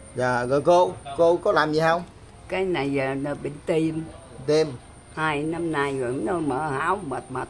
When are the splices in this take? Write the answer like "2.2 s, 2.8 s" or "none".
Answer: none